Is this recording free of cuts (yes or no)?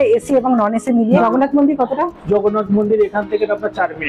no